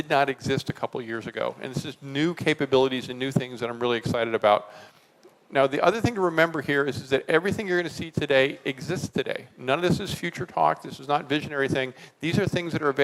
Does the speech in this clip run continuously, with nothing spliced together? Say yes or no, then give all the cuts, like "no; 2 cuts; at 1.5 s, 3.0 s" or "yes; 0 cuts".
yes; 0 cuts